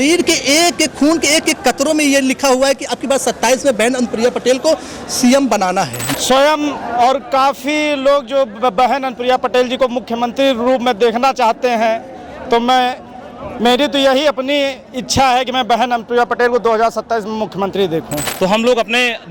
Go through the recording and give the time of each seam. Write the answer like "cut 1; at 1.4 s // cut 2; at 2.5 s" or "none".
cut 1; at 6.1 s // cut 2; at 18.2 s